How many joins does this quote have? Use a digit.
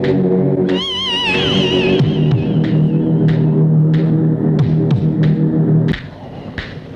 1